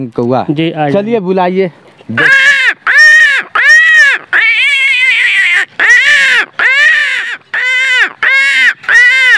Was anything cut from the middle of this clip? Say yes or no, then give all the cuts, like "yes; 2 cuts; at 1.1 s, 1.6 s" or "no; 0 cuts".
yes; 1 cut; at 7.3 s